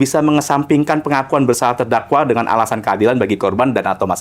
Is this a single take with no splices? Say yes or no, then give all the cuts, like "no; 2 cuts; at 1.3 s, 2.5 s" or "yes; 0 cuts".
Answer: yes; 0 cuts